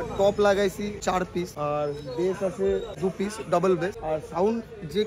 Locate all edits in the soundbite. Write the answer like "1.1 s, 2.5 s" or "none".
1.2 s, 2.9 s, 4.0 s